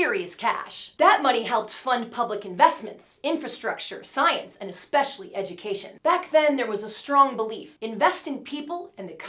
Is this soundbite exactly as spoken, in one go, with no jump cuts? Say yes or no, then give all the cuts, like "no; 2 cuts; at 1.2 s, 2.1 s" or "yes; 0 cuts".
yes; 0 cuts